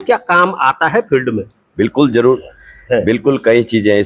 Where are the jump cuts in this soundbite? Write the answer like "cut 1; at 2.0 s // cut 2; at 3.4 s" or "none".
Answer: none